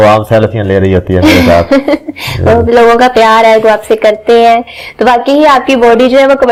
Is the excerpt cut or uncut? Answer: uncut